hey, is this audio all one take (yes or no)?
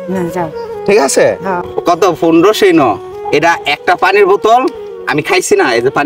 no